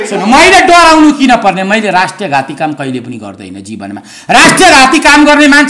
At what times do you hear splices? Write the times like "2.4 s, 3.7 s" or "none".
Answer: none